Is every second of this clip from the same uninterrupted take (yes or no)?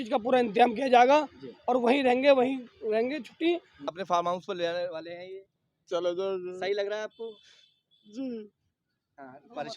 no